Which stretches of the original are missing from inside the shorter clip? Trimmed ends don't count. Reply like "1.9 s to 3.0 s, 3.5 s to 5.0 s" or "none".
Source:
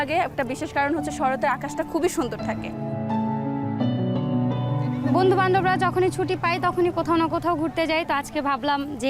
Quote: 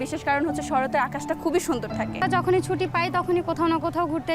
2.7 s to 5.7 s

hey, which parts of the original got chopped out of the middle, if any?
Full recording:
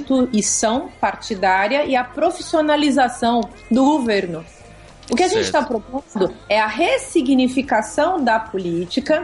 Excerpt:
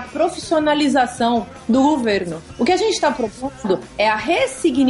4.4 s to 4.9 s

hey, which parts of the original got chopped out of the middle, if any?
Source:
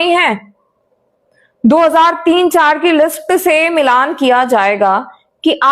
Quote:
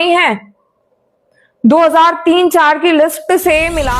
none

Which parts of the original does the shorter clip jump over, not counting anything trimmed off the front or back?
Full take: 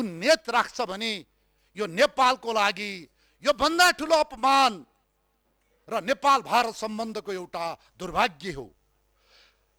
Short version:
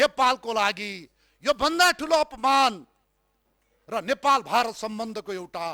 none

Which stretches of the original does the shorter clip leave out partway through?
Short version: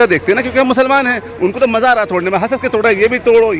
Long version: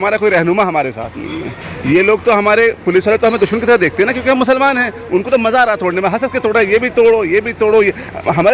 none

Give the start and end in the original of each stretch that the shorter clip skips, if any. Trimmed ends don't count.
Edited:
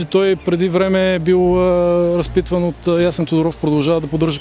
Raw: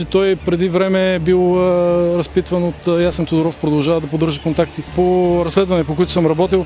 none

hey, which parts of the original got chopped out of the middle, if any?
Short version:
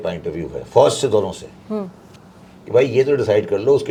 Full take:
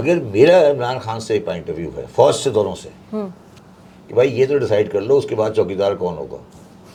none

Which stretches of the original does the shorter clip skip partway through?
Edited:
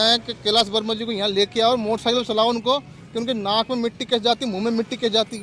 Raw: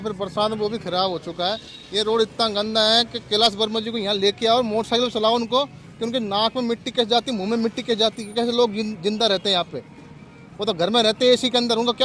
none

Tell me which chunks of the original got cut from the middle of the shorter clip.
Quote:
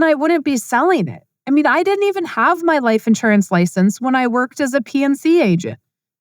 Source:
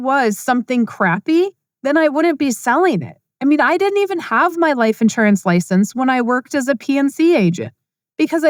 none

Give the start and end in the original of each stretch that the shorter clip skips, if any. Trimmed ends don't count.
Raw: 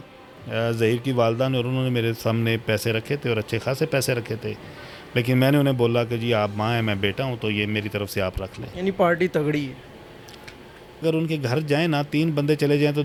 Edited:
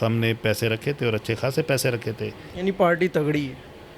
4.7 s to 8.6 s

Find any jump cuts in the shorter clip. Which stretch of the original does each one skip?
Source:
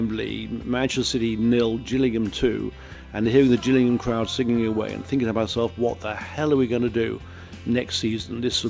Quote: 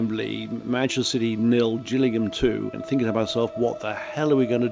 2.8 s to 5.0 s

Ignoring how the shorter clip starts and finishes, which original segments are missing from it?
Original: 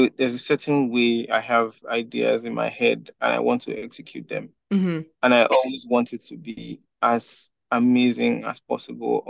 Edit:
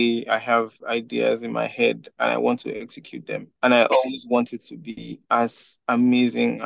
4.5 s to 5.1 s, 6.7 s to 6.8 s, 7.4 s to 7.5 s

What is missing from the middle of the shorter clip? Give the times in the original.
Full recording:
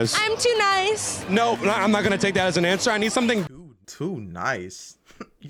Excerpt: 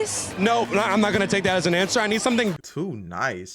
3.6 s to 3.9 s

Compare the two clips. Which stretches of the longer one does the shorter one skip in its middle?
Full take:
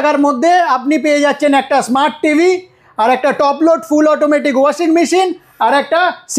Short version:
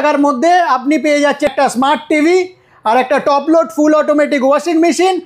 1.5 s to 1.6 s

